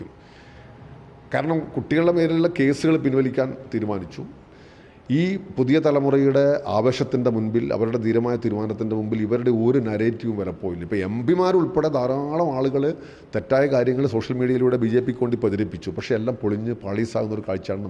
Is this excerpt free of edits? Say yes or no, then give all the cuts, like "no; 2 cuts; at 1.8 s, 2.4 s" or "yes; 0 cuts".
no; 1 cut; at 4.5 s